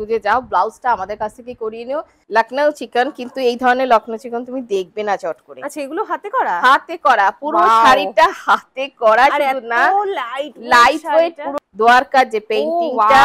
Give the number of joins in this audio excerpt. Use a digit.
2